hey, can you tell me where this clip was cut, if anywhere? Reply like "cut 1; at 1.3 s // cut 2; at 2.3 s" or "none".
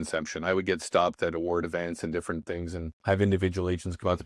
cut 1; at 2.9 s